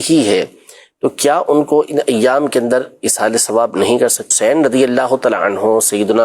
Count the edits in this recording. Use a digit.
1